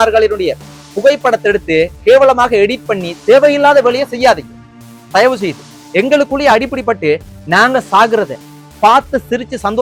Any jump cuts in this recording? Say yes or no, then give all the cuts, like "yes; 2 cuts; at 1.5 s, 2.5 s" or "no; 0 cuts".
no; 0 cuts